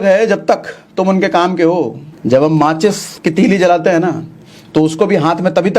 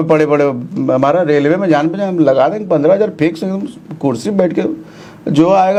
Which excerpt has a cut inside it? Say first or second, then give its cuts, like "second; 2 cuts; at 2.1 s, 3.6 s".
first; 2 cuts; at 2.1 s, 3.1 s